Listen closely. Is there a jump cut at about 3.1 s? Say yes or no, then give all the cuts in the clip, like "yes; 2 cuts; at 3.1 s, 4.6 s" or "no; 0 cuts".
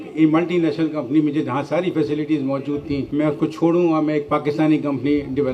yes; 1 cut; at 3.1 s